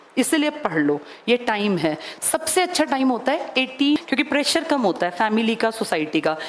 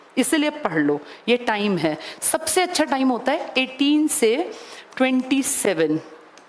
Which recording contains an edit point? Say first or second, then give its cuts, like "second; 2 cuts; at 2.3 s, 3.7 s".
first; 1 cut; at 4.0 s